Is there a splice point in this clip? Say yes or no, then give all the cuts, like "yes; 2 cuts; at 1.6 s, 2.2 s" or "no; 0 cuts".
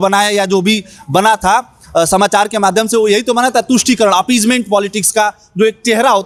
no; 0 cuts